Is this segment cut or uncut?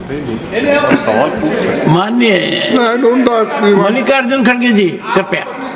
uncut